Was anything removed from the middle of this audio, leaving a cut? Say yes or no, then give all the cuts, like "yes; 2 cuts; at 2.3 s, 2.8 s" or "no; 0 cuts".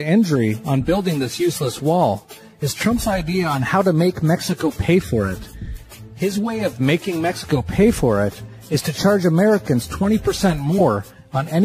yes; 1 cut; at 10.6 s